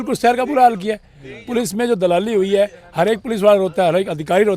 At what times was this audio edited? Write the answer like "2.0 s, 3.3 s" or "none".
none